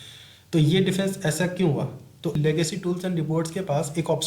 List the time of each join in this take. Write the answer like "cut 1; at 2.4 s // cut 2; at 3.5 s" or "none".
cut 1; at 2.3 s